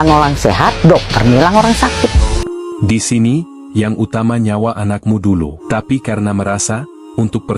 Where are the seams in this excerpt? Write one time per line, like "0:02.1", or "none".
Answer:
0:02.3
0:05.6